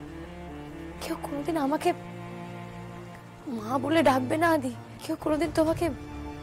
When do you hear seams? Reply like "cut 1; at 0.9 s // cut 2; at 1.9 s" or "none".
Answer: cut 1; at 4.9 s